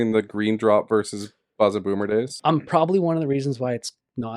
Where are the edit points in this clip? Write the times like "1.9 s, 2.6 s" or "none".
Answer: 2.3 s